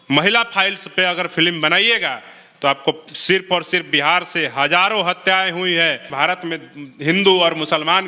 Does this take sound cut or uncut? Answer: cut